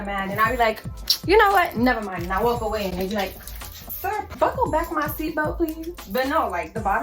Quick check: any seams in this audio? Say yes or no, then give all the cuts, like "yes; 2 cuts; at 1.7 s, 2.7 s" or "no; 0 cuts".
yes; 2 cuts; at 4.1 s, 6.0 s